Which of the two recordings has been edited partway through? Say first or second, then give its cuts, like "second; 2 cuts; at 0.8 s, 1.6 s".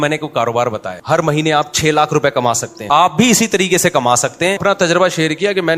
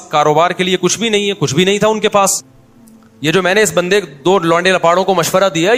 first; 3 cuts; at 0.9 s, 2.7 s, 4.6 s